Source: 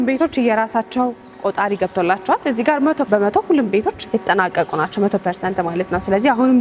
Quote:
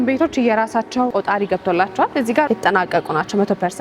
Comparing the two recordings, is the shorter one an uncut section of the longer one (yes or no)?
no